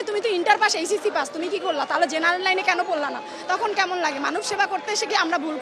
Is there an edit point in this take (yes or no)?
no